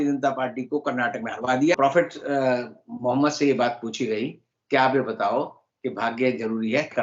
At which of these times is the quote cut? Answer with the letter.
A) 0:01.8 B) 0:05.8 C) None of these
A